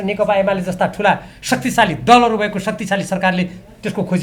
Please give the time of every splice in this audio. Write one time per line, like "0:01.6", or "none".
none

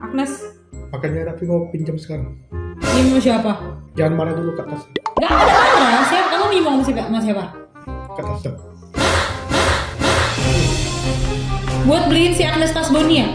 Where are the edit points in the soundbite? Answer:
none

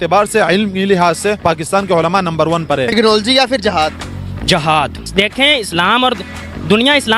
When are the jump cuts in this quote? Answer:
0:02.9

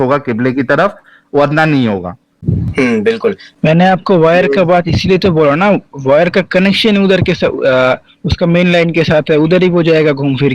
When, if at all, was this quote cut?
none

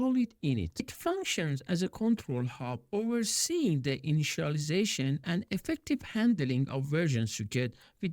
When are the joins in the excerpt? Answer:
0:00.9

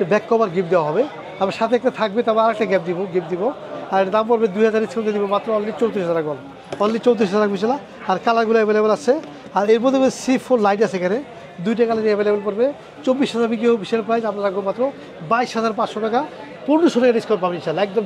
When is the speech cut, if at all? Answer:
none

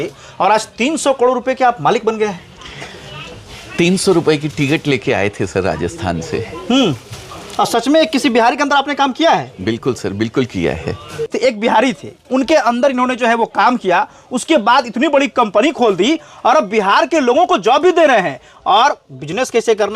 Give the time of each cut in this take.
0:11.3

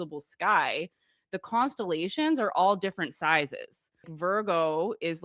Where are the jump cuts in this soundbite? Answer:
0:04.1

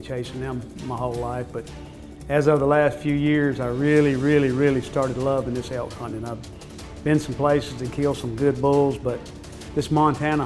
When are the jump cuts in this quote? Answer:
none

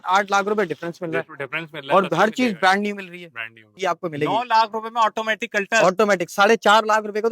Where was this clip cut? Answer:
0:03.7

